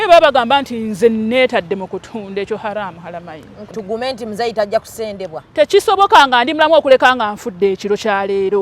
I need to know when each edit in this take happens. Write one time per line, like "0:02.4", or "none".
0:03.7